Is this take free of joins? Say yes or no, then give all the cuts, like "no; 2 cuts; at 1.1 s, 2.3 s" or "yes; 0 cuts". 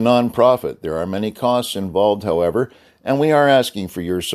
yes; 0 cuts